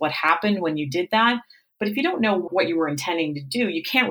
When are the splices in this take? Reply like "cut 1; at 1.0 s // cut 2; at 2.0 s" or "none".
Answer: cut 1; at 2.5 s